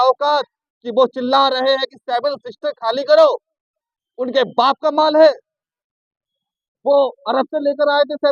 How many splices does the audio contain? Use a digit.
0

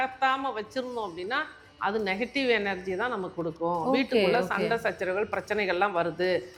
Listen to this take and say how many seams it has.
0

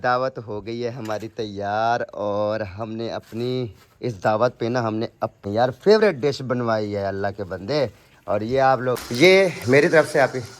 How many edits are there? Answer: 2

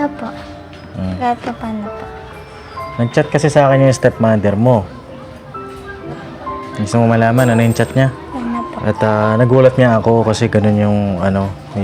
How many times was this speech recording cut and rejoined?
1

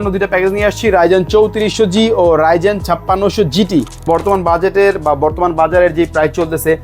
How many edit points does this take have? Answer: 1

